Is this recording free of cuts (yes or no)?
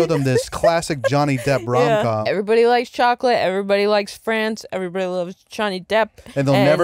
no